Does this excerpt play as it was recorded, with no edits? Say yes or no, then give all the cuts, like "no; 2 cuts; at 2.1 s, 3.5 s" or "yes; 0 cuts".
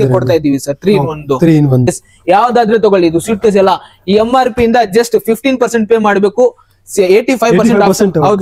no; 1 cut; at 1.9 s